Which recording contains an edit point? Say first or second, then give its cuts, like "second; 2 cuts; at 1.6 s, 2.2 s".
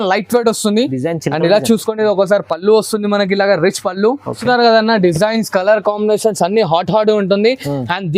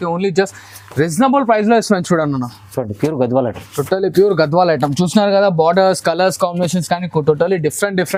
first; 1 cut; at 4.4 s